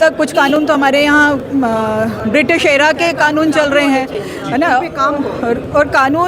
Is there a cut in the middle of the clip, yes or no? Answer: no